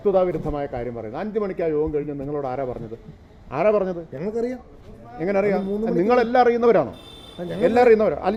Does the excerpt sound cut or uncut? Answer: uncut